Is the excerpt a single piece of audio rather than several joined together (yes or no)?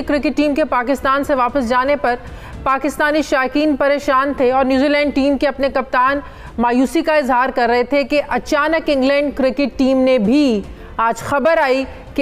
yes